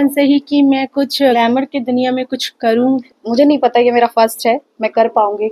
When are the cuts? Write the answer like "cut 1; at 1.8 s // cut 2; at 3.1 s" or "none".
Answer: cut 1; at 1.3 s // cut 2; at 3.0 s